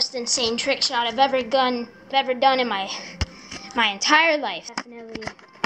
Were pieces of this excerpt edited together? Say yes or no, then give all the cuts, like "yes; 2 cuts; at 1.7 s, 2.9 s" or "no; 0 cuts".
yes; 2 cuts; at 2.1 s, 4.6 s